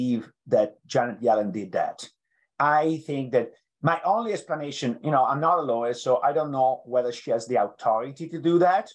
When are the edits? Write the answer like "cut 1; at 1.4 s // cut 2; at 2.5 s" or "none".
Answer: none